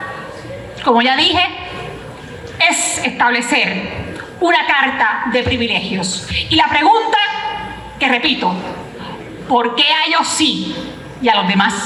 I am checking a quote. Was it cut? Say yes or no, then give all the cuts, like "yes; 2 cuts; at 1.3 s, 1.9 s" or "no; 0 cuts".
no; 0 cuts